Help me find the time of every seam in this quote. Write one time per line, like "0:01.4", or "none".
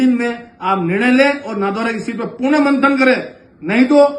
none

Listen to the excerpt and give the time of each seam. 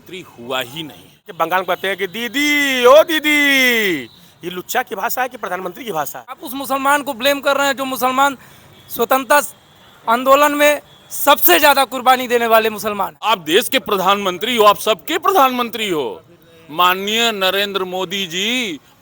0:01.3
0:06.5
0:13.2

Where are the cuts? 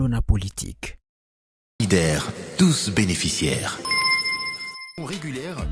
0:01.8

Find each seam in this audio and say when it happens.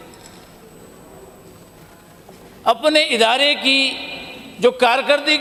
none

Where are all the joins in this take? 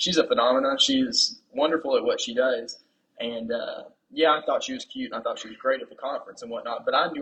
none

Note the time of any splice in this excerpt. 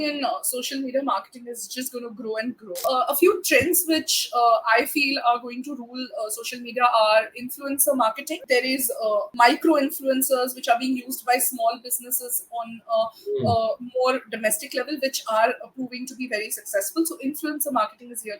0:02.8
0:08.8

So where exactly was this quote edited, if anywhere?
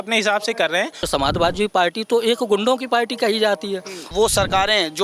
0:01.0
0:04.1

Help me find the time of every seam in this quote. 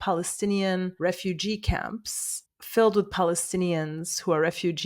0:00.9

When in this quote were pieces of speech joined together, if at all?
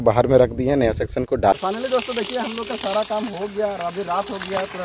0:01.5

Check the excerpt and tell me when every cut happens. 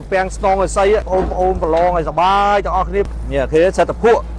0:01.1
0:03.1

